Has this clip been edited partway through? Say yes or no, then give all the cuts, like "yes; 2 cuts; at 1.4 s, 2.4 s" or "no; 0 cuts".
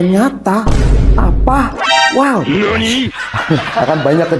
no; 0 cuts